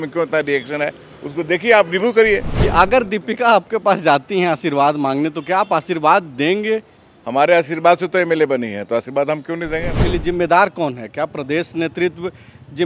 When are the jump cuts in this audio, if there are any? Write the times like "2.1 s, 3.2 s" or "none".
2.6 s, 9.9 s